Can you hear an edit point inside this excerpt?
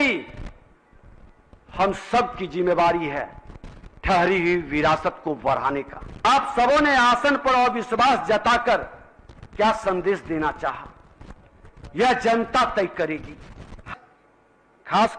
yes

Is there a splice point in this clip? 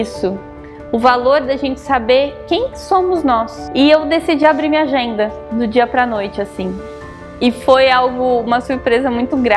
yes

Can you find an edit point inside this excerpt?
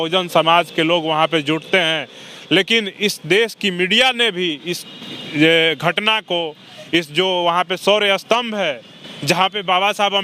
no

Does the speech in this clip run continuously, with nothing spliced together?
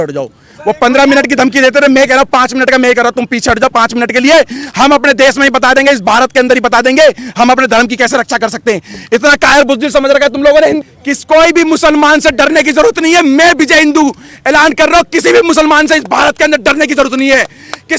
no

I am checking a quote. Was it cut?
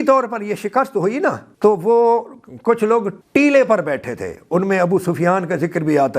yes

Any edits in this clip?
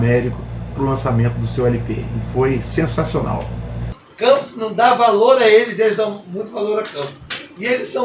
yes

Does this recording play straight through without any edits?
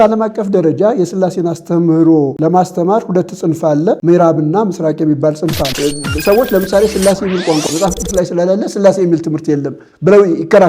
no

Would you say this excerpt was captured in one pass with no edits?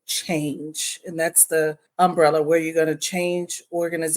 no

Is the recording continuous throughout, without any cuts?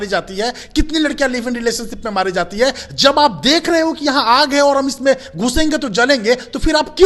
yes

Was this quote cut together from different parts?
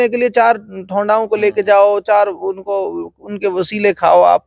no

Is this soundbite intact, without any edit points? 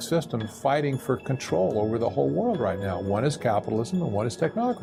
yes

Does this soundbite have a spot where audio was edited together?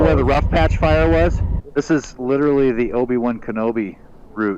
yes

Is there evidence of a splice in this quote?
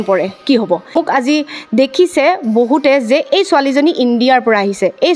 yes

